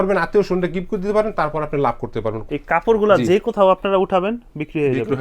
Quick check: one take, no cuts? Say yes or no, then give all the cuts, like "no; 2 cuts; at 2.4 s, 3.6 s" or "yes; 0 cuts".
no; 1 cut; at 2.3 s